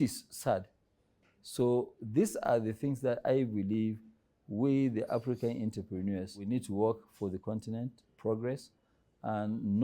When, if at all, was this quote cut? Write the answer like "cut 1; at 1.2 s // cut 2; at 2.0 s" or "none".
cut 1; at 6.4 s